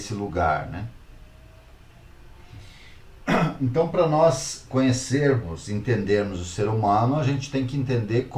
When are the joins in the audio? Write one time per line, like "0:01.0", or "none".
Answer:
none

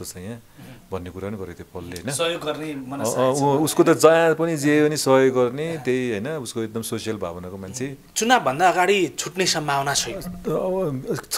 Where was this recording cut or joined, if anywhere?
0:08.0

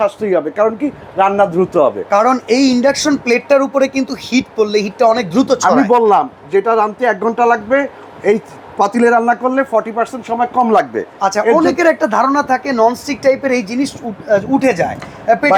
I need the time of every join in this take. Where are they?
none

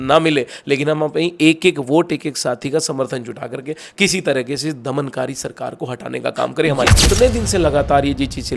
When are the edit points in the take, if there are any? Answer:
0:06.9

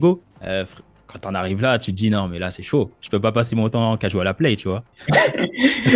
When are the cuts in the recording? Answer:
0:04.9

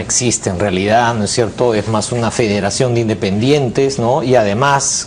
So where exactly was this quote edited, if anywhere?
0:03.2

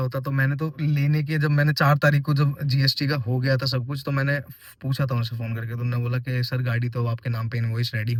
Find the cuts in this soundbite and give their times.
none

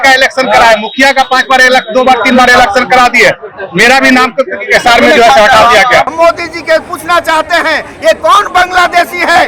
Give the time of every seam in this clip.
0:06.1

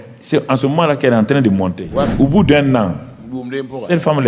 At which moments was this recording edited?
0:02.1

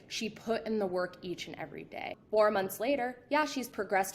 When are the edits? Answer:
0:02.1

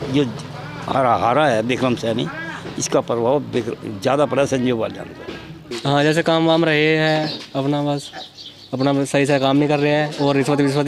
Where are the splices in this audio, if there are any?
0:05.7

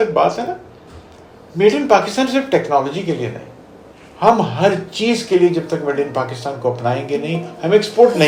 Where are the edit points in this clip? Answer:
none

